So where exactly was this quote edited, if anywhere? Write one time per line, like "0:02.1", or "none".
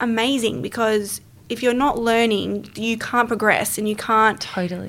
none